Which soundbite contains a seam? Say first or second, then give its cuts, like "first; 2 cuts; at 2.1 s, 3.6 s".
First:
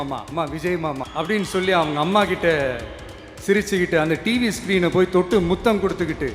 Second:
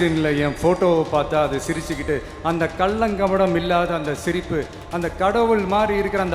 first; 1 cut; at 1.1 s